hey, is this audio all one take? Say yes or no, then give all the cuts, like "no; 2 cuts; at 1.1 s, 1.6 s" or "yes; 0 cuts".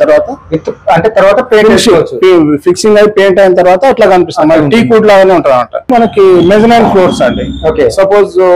no; 1 cut; at 5.9 s